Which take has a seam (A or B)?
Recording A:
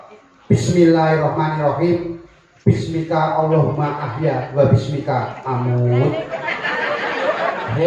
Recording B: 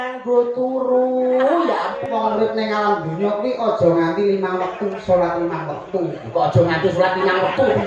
B